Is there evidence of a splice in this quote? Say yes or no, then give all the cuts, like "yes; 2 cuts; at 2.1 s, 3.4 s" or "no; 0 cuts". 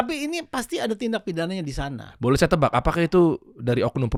no; 0 cuts